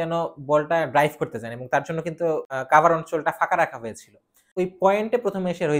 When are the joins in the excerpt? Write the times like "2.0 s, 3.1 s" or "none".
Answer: 2.5 s, 4.5 s